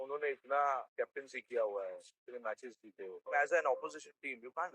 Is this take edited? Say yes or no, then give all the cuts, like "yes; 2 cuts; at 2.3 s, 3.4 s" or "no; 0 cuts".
yes; 2 cuts; at 0.9 s, 3.2 s